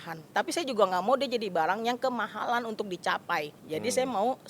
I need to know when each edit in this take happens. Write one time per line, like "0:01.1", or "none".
0:03.6

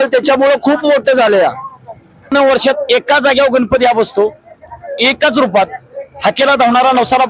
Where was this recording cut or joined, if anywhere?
0:02.3

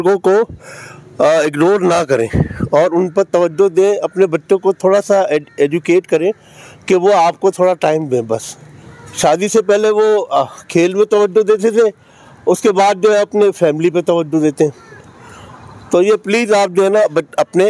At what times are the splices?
none

